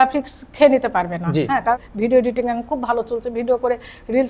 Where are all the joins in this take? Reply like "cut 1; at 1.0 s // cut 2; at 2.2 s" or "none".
cut 1; at 1.8 s